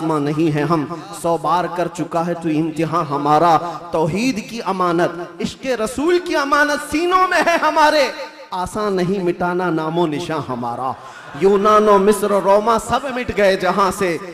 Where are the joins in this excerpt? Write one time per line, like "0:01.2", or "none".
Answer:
none